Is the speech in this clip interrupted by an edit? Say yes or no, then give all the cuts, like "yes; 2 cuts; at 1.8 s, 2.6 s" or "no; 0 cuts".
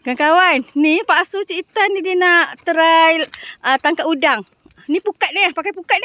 no; 0 cuts